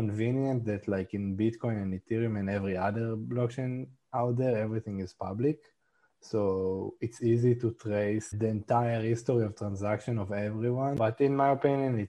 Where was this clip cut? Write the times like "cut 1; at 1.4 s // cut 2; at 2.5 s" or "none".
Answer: cut 1; at 8.3 s // cut 2; at 11.0 s